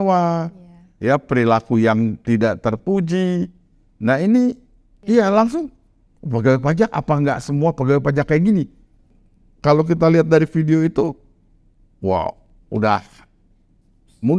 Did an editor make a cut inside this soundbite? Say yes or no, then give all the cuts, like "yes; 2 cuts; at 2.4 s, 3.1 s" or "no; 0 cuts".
yes; 2 cuts; at 5.1 s, 9.1 s